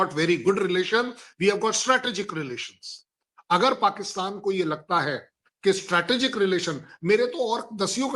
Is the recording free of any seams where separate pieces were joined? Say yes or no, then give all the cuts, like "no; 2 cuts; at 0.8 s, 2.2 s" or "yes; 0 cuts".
yes; 0 cuts